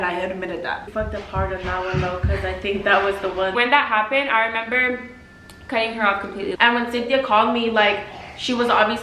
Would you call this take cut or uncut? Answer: cut